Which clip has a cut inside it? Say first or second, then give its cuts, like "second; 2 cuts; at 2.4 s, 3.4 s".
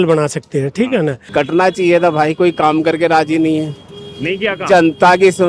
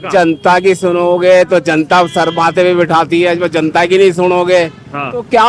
first; 1 cut; at 1.2 s